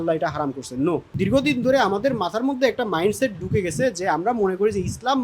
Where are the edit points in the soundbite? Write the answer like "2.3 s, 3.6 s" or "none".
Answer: 1.1 s